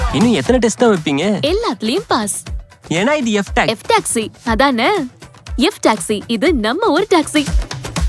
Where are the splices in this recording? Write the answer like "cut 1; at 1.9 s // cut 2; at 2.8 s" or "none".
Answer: none